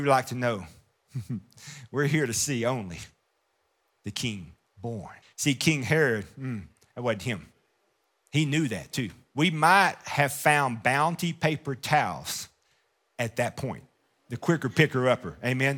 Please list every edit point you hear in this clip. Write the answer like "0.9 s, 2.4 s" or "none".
5.2 s, 9.2 s